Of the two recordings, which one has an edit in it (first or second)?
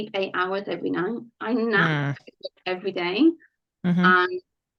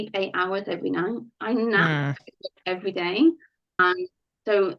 second